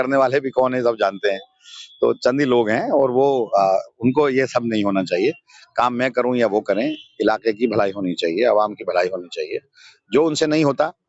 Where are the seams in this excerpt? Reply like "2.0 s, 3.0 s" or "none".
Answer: none